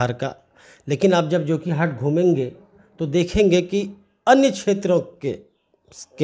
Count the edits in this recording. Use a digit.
0